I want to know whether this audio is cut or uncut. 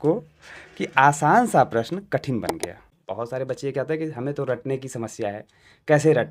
cut